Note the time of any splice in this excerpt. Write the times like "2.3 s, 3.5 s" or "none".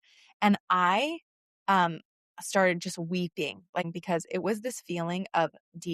3.9 s